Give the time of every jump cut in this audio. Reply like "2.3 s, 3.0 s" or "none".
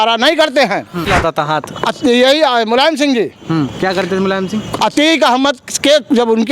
1.1 s